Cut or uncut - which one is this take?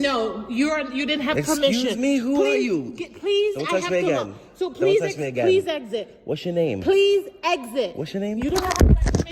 uncut